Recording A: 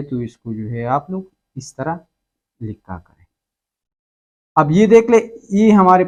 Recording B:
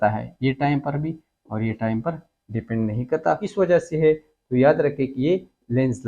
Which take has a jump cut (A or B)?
B